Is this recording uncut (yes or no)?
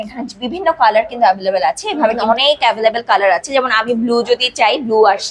no